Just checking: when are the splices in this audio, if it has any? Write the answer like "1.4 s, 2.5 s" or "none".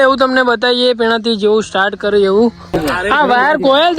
2.6 s